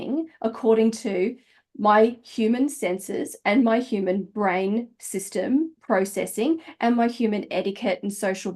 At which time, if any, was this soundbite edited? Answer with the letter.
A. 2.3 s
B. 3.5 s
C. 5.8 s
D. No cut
C